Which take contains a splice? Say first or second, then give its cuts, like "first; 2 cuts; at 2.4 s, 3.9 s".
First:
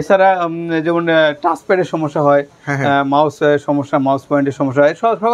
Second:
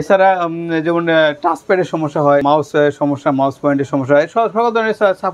second; 1 cut; at 2.4 s